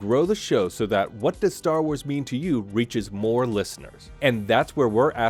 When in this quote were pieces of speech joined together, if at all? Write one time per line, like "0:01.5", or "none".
none